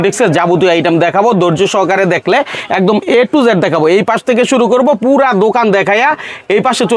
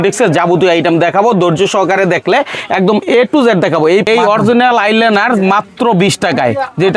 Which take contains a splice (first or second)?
second